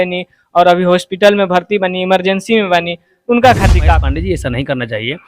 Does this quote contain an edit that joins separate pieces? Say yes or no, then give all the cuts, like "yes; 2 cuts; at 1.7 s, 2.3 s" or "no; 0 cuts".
yes; 1 cut; at 4.0 s